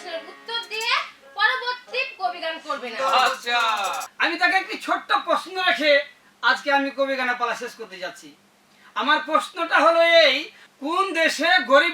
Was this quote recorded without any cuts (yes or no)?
no